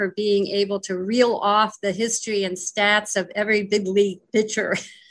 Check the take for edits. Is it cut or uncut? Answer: uncut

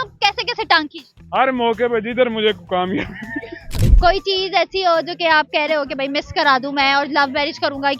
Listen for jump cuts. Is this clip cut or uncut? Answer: cut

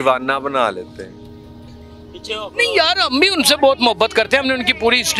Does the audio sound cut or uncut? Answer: uncut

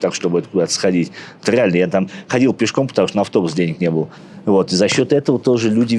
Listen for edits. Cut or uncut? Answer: uncut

